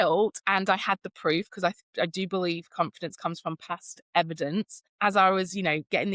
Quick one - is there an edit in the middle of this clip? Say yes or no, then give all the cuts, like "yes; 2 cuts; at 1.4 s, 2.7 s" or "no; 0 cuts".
no; 0 cuts